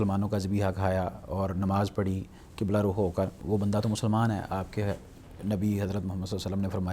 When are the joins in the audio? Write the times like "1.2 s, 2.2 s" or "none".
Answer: 3.4 s